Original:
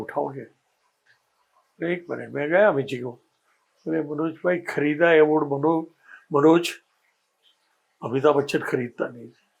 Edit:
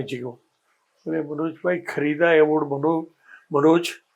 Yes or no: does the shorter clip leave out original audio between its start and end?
no